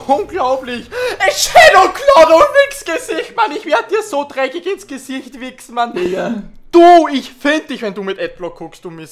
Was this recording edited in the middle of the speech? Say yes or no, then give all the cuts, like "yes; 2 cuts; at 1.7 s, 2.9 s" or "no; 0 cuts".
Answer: no; 0 cuts